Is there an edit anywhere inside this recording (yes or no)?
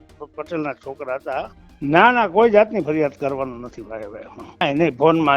yes